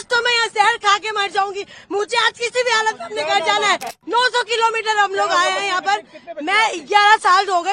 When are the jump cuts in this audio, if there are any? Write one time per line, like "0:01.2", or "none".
0:04.0